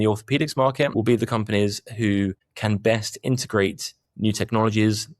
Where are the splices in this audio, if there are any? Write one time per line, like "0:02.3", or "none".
0:00.9